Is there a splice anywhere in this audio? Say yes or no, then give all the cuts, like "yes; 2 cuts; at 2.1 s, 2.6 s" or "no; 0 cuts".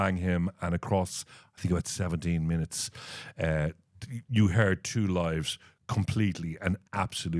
no; 0 cuts